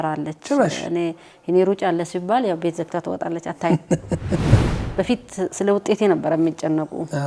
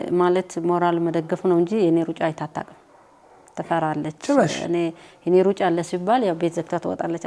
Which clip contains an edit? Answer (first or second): first